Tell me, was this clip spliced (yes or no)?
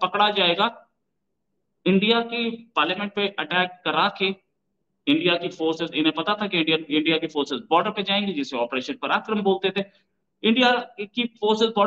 no